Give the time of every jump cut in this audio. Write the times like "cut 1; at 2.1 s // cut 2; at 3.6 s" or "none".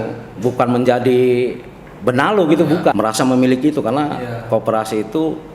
cut 1; at 2.9 s